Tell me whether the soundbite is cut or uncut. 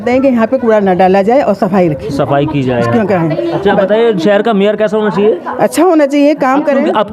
uncut